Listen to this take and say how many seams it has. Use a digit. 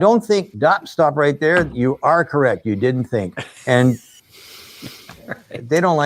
0